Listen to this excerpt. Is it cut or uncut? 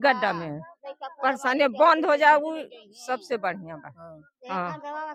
uncut